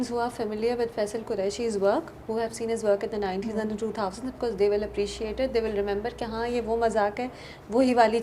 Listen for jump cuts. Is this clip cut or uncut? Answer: uncut